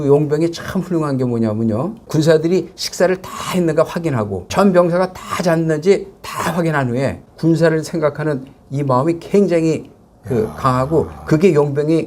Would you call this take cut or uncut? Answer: cut